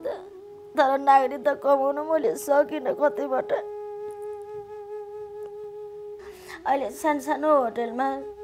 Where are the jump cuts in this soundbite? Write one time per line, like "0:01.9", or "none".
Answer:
0:03.6
0:06.0